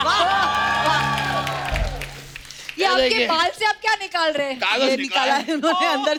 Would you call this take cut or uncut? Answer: uncut